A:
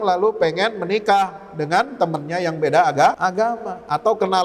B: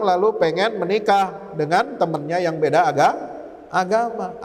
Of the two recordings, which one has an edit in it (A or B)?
A